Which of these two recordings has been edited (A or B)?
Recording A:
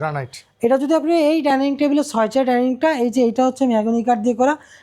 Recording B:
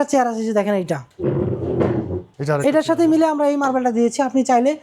B